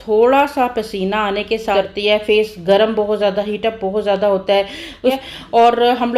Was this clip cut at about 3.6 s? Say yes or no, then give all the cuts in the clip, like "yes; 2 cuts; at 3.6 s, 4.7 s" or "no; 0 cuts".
no; 2 cuts; at 1.7 s, 5.2 s